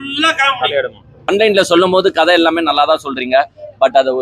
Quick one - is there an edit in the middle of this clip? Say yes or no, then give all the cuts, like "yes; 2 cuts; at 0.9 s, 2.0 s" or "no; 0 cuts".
yes; 1 cut; at 1.3 s